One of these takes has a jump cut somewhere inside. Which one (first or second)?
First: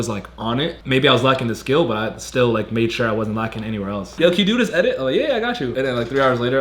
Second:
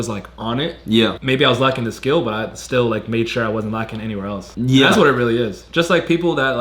first